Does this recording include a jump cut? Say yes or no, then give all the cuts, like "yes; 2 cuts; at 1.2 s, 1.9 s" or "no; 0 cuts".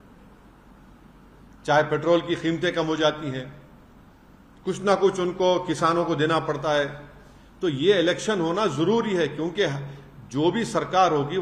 no; 0 cuts